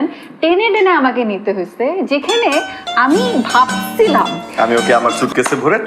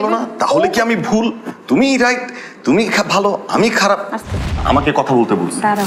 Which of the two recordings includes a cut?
first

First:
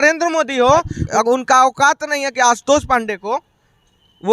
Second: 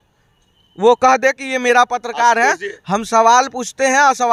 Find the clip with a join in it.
first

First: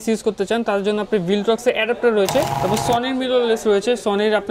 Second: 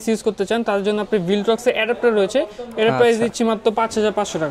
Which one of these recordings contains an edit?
first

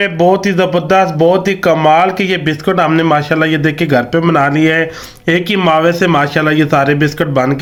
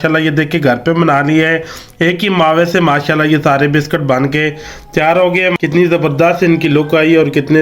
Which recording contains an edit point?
second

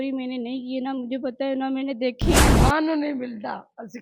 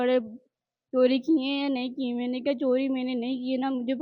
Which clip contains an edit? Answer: first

